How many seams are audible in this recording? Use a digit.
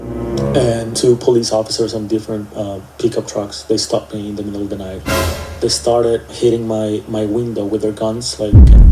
2